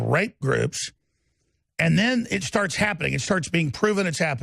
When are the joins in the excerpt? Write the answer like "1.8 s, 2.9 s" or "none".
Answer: none